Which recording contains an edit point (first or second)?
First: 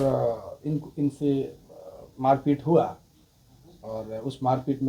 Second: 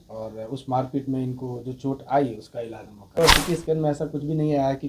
second